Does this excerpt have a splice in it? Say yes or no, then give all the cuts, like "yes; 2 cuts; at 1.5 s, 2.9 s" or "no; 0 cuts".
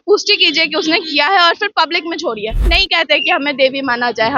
yes; 1 cut; at 2.6 s